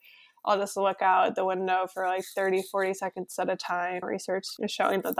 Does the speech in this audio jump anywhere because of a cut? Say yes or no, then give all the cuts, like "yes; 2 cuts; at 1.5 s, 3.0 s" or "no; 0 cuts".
yes; 1 cut; at 4.0 s